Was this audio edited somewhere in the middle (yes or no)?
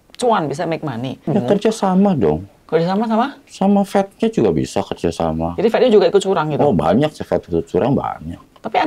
yes